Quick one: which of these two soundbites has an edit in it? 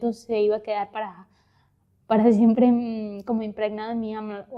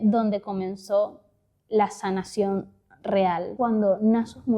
second; 1 cut; at 3.5 s

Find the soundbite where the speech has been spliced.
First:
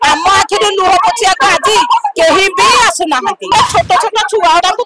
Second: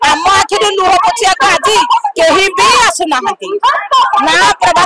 first; 1 cut; at 3.5 s

